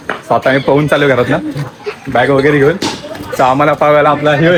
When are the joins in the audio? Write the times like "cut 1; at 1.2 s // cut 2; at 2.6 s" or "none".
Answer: none

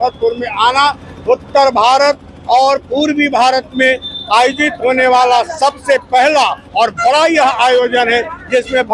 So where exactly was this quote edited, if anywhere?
none

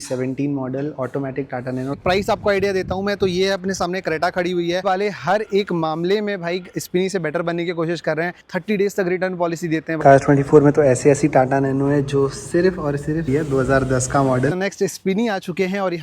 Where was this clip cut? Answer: cut 1; at 2.0 s // cut 2; at 4.8 s // cut 3; at 8.5 s // cut 4; at 10.0 s // cut 5; at 13.3 s // cut 6; at 14.5 s

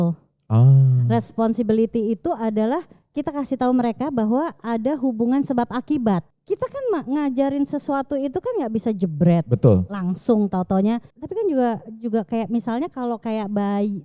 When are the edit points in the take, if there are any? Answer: cut 1; at 6.3 s // cut 2; at 11.2 s

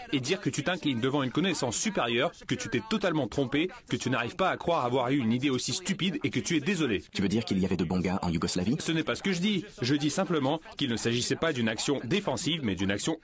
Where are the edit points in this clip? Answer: cut 1; at 9.2 s

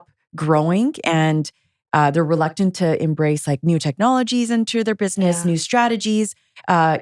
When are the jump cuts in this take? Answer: none

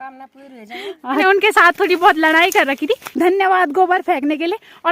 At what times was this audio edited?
cut 1; at 1.2 s // cut 2; at 3.1 s

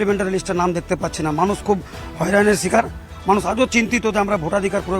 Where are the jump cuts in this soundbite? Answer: none

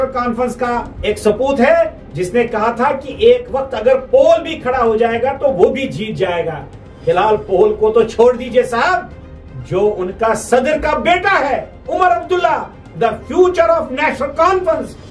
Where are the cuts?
cut 1; at 0.9 s

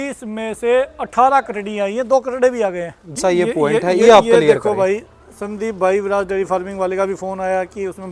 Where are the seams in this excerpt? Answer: cut 1; at 3.2 s

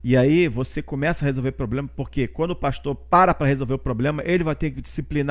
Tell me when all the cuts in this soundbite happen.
none

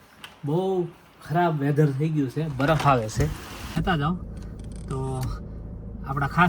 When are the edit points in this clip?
cut 1; at 3.7 s

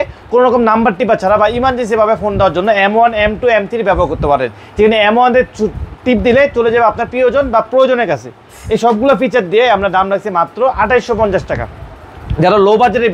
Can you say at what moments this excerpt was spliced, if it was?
none

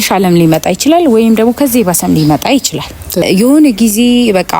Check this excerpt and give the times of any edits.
cut 1; at 3.2 s

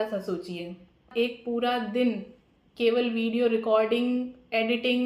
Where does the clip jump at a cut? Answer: cut 1; at 1.1 s

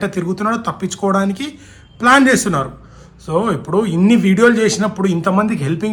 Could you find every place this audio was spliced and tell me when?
none

